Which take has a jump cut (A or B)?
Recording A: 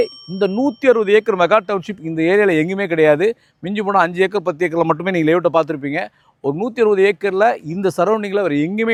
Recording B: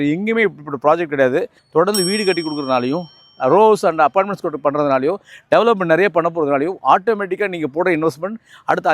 B